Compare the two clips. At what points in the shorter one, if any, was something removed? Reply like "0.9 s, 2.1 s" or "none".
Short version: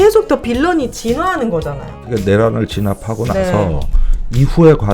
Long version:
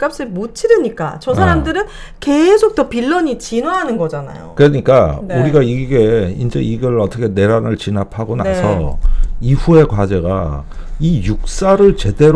2.0 s